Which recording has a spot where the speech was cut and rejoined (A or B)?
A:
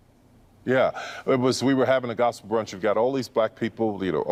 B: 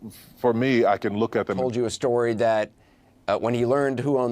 B